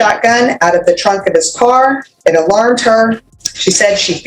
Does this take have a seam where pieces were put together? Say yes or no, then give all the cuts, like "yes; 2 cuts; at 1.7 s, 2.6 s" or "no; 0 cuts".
yes; 2 cuts; at 2.1 s, 3.3 s